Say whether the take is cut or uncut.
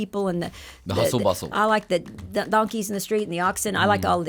uncut